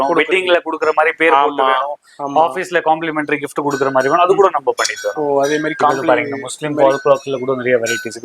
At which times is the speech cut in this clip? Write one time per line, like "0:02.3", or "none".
none